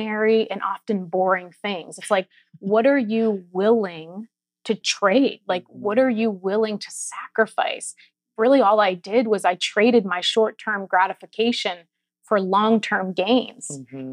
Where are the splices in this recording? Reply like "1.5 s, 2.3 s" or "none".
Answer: 4.9 s, 8.1 s

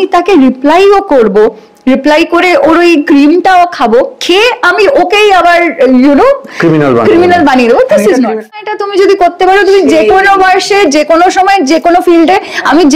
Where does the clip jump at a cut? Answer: 8.6 s

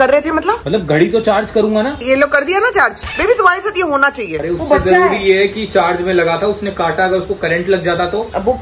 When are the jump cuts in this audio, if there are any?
2.0 s, 4.4 s

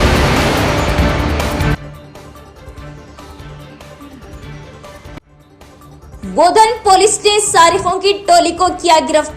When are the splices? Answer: 1.5 s

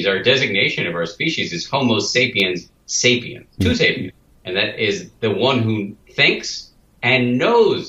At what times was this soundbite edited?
3.4 s, 6.0 s

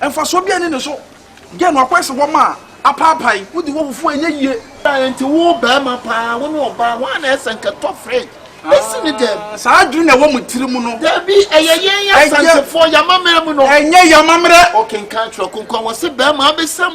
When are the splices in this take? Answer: 4.8 s

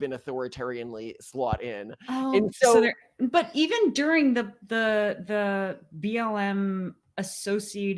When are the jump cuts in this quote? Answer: none

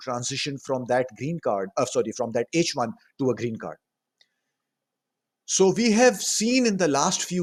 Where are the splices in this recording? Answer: none

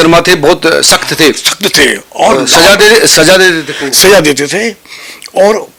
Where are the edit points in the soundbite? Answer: none

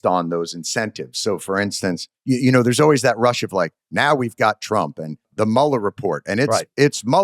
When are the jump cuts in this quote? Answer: 2.1 s, 5.3 s

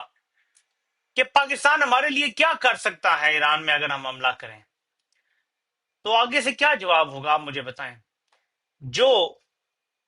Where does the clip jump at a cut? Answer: none

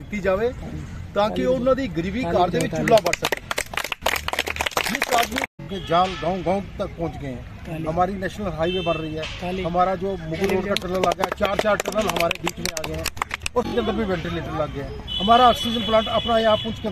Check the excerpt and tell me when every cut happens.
5.5 s, 13.7 s

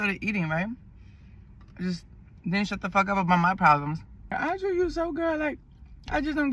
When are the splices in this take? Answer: 4.3 s

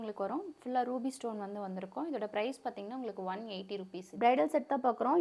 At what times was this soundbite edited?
4.0 s

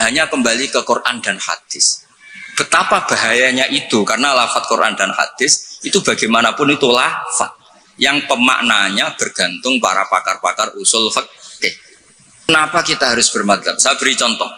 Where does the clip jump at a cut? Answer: 12.5 s

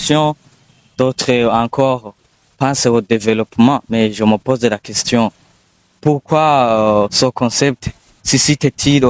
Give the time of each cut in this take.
none

